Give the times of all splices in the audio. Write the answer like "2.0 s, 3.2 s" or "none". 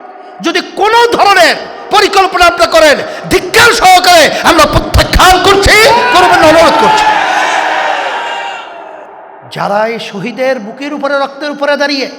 9.2 s